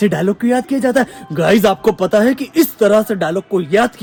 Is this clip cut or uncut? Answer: uncut